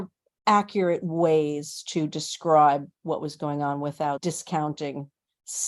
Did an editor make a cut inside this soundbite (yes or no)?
yes